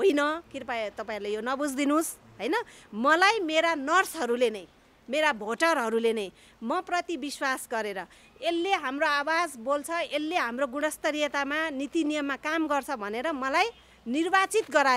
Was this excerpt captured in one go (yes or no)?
yes